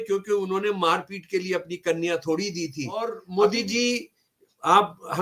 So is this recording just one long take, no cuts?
no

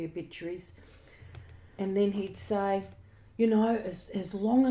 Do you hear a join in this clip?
yes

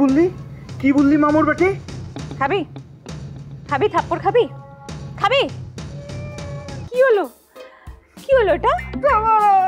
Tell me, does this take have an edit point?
yes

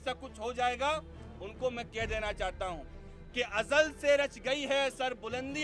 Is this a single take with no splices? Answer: yes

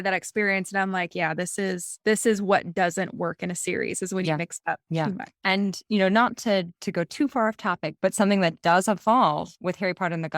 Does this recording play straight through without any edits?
no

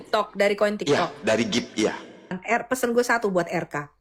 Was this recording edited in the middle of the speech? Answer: yes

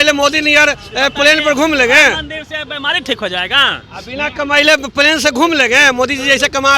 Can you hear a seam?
no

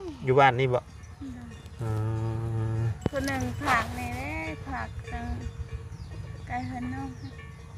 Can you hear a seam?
no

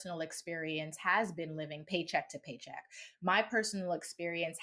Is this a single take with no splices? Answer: no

